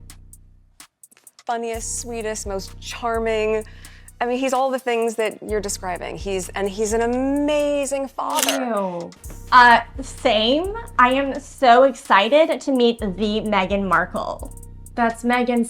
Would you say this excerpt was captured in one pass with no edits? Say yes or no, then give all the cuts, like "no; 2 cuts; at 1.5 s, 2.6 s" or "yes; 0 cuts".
no; 1 cut; at 8.6 s